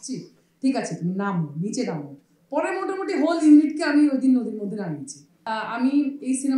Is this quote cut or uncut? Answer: cut